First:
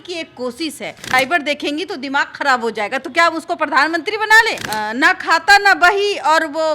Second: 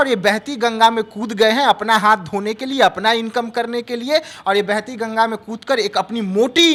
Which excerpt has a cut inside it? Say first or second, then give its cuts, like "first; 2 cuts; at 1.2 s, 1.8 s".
first; 2 cuts; at 1.0 s, 4.6 s